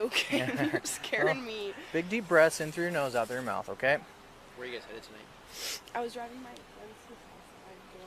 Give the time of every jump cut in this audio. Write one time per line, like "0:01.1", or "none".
none